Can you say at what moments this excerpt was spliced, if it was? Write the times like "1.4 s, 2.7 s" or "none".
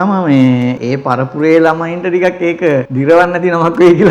0.8 s, 2.9 s